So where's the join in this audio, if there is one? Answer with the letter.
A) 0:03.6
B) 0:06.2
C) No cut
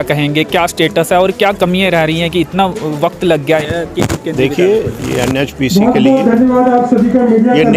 C